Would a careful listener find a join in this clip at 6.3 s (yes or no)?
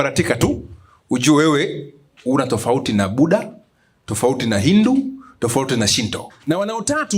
yes